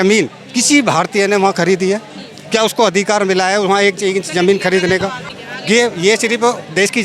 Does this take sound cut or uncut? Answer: cut